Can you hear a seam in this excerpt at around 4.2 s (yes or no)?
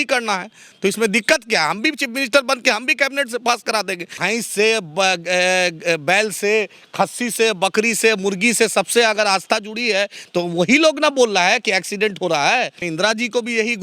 yes